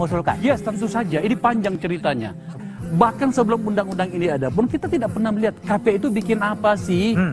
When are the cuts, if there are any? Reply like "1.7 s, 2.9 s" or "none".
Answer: 2.5 s